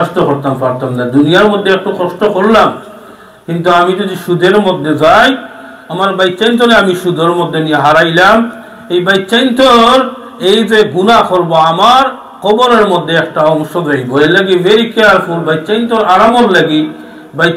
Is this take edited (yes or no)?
no